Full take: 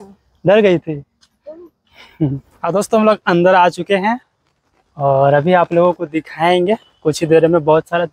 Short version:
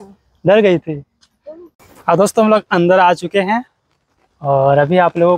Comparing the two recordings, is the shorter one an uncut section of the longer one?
no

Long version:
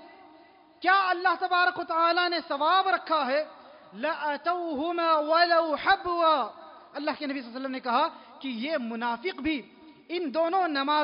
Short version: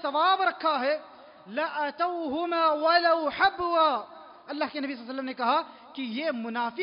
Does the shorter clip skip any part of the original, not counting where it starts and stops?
no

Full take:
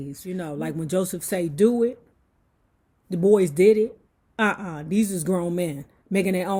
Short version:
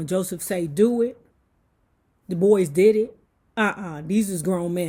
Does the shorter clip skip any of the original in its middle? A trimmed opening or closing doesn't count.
no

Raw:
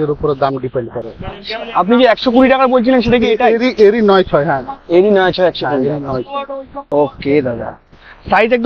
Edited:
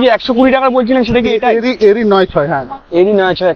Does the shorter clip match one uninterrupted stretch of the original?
yes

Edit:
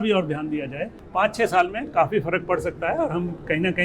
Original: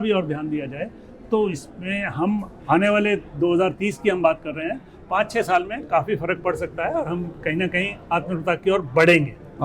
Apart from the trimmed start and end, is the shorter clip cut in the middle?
yes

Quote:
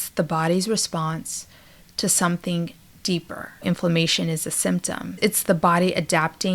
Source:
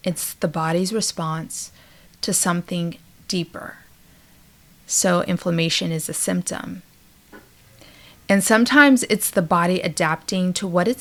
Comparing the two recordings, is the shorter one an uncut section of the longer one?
no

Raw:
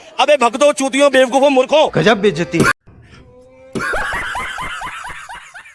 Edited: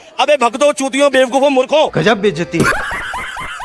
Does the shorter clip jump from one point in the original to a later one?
yes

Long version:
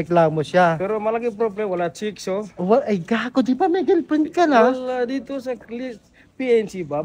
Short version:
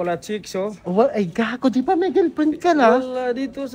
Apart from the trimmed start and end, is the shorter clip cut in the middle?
no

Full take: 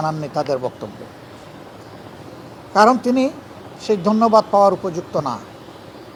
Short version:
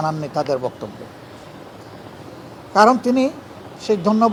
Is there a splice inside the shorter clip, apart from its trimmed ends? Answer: no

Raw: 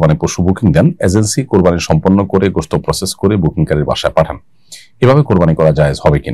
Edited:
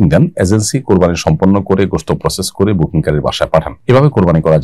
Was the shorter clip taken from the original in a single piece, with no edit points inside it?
no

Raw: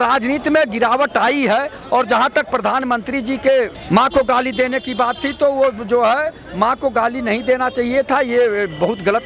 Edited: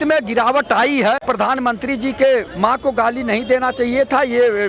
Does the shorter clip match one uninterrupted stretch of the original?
no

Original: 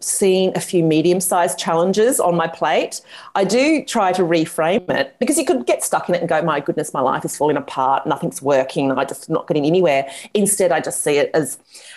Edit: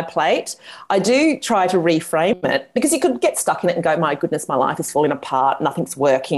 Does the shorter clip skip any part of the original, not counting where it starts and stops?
no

